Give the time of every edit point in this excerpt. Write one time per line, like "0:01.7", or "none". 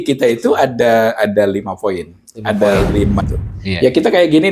0:03.2